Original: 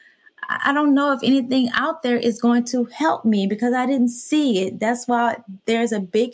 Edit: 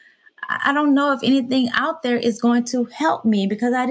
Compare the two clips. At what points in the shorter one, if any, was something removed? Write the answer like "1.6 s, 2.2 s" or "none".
none